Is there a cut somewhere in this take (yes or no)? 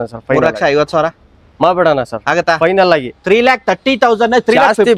no